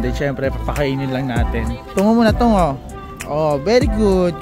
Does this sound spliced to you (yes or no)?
yes